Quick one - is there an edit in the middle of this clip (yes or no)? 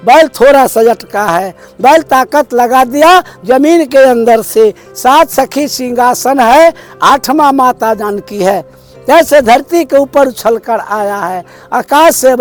no